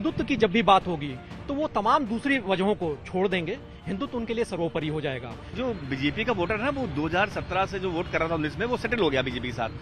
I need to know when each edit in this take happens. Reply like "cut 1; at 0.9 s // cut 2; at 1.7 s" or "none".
cut 1; at 5.5 s